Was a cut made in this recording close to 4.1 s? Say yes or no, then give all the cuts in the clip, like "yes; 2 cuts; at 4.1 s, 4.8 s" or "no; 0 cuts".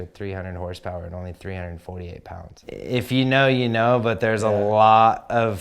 no; 1 cut; at 2.5 s